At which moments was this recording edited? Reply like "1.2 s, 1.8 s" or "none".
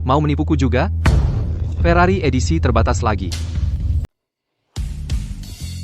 4.1 s